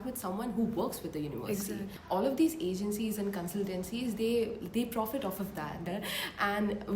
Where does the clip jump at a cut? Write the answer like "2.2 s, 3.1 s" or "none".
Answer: 1.9 s, 5.9 s